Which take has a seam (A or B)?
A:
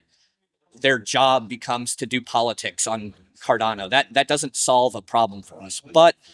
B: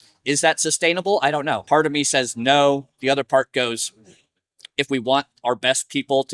B